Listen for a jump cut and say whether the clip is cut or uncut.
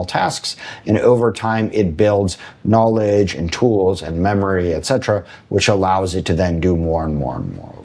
uncut